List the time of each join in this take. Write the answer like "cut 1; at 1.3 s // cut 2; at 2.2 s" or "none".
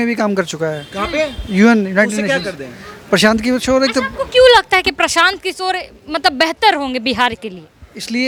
none